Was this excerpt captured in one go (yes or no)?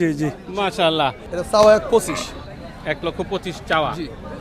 no